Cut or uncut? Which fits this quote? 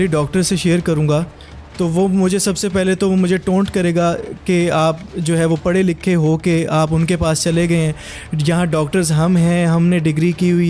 uncut